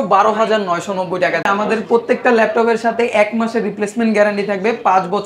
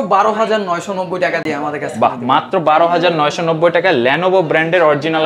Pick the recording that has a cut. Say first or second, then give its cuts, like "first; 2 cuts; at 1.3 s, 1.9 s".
first; 1 cut; at 1.4 s